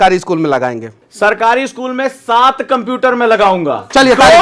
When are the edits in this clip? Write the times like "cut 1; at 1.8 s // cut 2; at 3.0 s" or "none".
cut 1; at 1.0 s